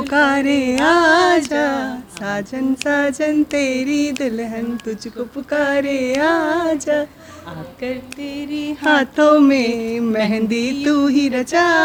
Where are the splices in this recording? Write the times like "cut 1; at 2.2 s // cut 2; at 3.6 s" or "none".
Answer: none

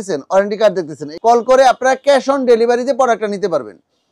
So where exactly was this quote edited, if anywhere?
cut 1; at 1.1 s

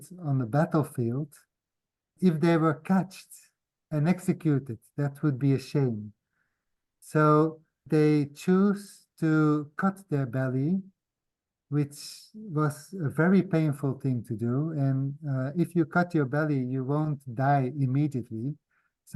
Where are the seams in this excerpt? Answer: none

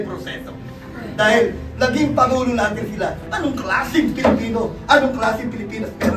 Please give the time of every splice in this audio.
cut 1; at 3.2 s

